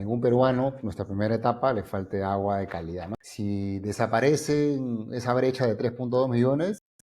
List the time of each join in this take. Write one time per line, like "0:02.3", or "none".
0:03.0

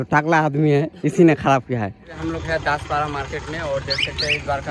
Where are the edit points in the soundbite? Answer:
0:02.1

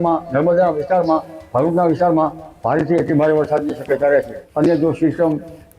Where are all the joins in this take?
0:04.4

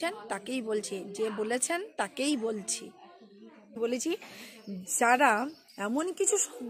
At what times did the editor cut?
0:03.8

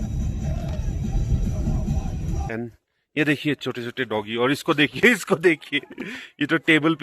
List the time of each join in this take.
0:02.5

